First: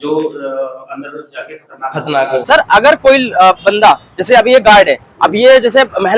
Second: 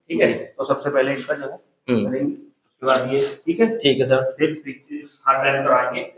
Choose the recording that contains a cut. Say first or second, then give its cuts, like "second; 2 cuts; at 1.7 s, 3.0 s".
first; 1 cut; at 2.4 s